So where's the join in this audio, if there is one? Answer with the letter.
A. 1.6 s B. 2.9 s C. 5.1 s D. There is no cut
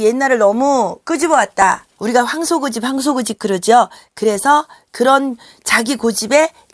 A